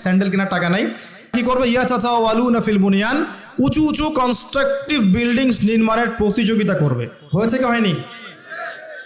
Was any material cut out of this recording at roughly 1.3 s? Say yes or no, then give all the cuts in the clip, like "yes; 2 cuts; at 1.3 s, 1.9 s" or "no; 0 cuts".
yes; 1 cut; at 1.3 s